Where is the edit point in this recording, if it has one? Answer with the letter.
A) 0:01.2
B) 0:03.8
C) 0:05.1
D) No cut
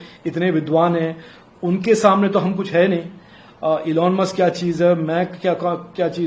D